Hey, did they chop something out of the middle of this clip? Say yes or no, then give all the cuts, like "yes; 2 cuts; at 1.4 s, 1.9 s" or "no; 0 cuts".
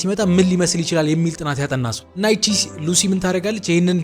yes; 1 cut; at 2.0 s